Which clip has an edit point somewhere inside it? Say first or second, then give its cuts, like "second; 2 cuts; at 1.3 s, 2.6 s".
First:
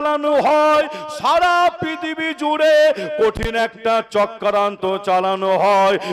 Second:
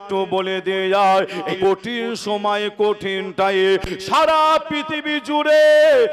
second; 1 cut; at 1.5 s